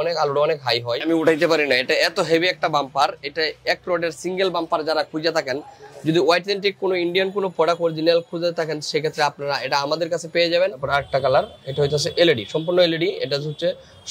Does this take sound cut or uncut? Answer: cut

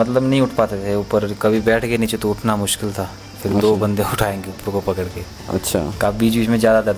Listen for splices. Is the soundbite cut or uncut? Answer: uncut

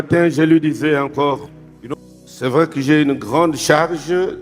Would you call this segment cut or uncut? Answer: cut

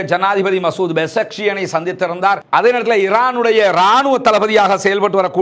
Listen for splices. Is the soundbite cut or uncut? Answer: uncut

